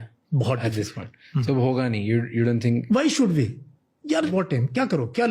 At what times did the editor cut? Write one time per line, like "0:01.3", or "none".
0:04.3